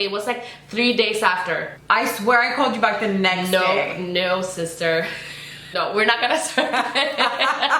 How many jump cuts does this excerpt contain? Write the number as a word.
two